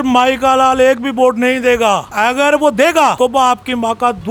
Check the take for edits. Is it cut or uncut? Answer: uncut